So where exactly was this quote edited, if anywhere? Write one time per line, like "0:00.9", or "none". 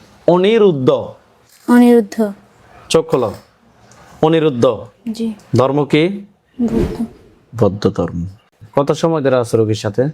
0:08.5